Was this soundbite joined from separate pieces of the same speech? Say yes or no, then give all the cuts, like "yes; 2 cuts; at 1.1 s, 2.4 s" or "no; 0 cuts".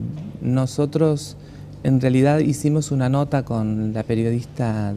no; 0 cuts